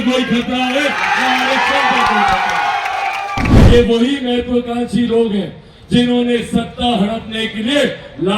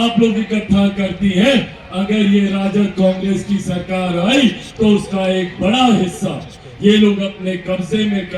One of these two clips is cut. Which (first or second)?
first